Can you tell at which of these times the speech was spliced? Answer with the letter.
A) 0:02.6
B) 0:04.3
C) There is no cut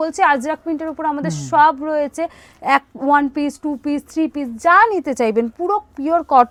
C